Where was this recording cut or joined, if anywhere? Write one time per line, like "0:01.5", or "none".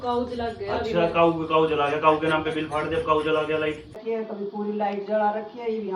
0:04.0

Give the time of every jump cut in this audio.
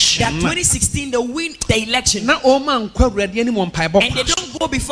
0:01.5

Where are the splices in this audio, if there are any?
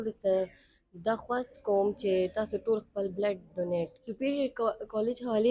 0:04.0

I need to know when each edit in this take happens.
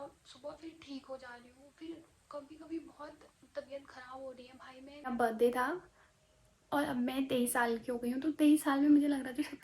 0:05.1

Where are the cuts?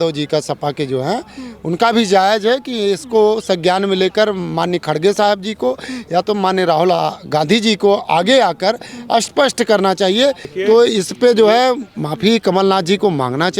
0:10.5

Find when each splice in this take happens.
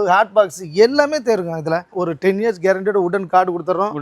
0:01.9

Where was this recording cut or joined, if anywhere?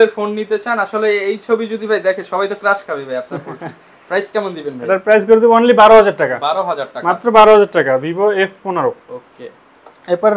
none

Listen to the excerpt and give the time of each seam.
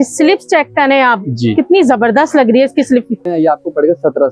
0:03.3

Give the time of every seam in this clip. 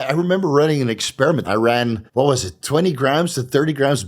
0:01.5

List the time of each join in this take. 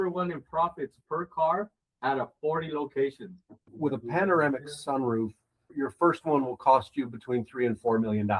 0:03.6

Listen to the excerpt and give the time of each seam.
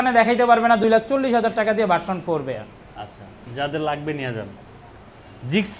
none

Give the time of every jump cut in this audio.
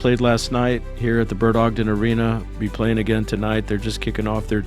none

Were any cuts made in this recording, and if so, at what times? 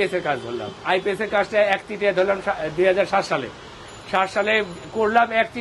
none

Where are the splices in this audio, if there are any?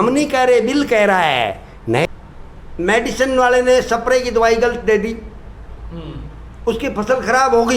0:02.1

